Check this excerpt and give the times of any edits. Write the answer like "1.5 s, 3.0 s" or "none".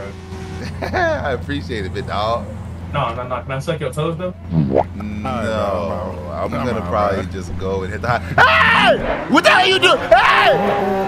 2.8 s

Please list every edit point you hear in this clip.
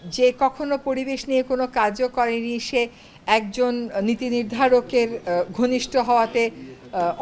none

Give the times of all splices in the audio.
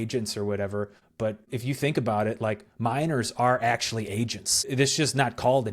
1.4 s, 4.7 s

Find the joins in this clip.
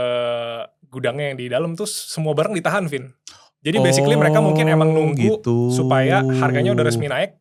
none

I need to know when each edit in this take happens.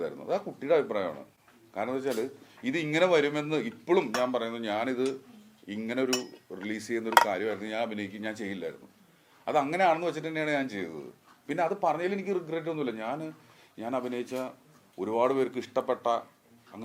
none

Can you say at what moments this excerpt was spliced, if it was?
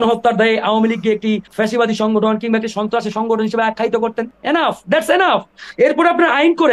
1.5 s, 4.3 s, 5.6 s

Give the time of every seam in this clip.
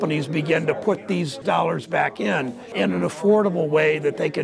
1.4 s, 2.7 s

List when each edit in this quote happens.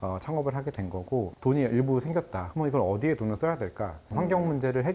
1.3 s, 2.4 s, 4.0 s

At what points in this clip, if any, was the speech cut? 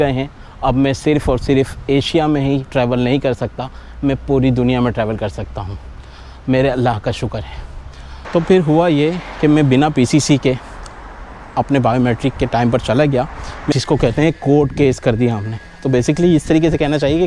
8.1 s, 13.7 s

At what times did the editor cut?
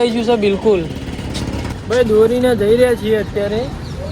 1.7 s

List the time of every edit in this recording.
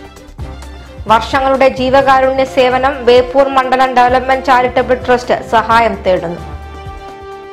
none

